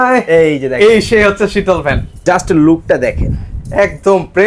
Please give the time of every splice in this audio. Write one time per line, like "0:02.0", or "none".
0:02.2